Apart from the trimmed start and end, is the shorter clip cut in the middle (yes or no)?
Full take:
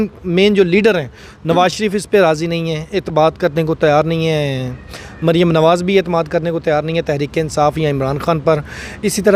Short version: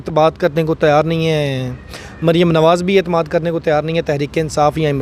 no